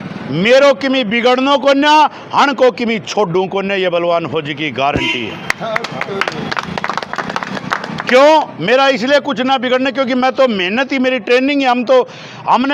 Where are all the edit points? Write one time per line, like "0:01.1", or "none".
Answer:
none